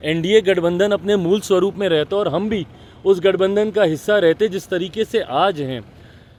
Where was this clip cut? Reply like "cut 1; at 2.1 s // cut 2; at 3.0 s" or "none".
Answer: none